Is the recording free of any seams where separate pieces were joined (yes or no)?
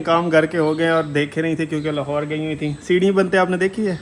yes